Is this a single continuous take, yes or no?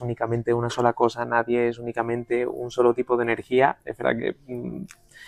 yes